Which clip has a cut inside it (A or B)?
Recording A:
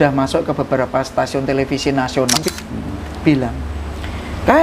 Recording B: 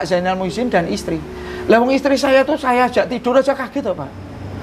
A